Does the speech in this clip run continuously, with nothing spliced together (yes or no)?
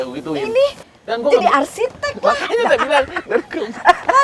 yes